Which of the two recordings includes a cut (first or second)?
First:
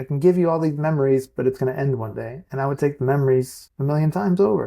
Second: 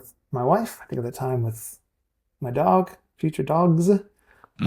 first